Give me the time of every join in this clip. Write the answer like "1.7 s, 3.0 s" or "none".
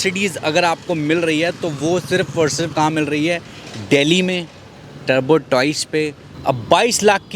6.3 s